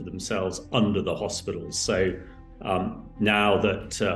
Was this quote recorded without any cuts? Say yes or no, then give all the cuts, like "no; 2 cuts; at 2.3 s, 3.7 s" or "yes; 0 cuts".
yes; 0 cuts